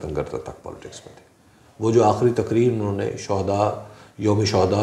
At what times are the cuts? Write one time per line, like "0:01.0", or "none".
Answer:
none